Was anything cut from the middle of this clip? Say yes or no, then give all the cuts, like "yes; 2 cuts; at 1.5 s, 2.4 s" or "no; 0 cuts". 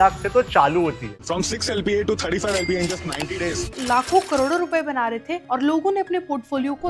yes; 2 cuts; at 1.1 s, 3.7 s